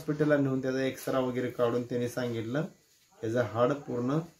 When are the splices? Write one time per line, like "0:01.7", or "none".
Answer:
none

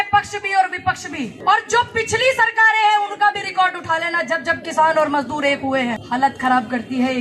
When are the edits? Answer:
0:01.3
0:06.0

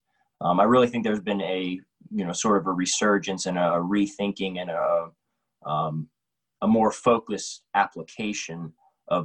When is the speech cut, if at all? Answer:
none

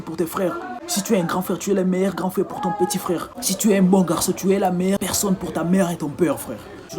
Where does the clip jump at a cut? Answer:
0:05.0

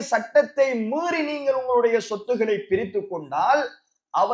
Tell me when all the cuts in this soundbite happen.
none

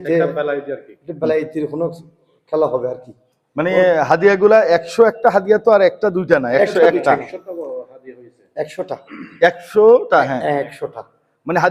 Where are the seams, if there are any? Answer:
none

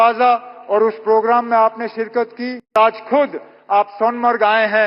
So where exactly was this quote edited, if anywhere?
0:02.7

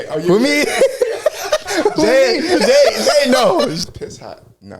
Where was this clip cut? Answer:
0:03.8

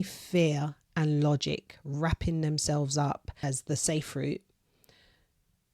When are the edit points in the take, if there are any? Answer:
0:03.4

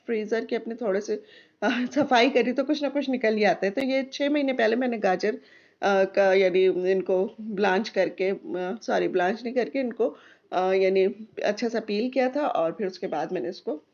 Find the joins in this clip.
none

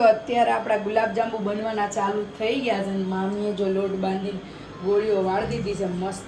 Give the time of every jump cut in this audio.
none

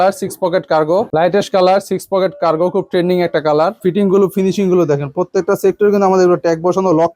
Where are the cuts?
0:01.1
0:03.8

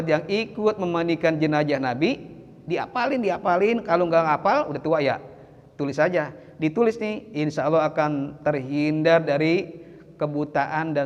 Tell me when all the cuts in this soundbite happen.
none

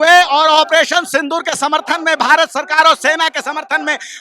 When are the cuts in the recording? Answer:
none

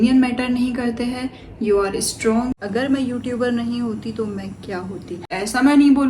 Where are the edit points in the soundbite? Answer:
0:02.5
0:05.2

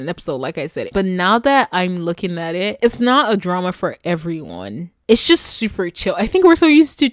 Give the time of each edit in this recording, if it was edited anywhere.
0:00.8
0:02.8

